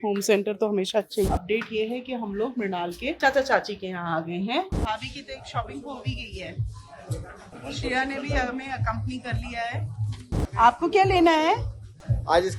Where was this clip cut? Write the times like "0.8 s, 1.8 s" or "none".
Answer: 1.3 s, 4.7 s, 7.5 s, 10.3 s

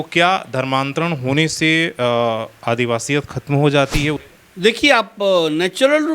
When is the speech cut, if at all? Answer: 4.2 s

